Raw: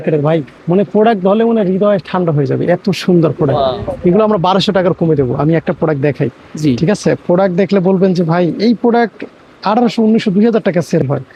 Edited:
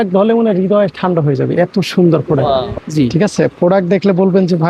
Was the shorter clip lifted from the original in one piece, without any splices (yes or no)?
no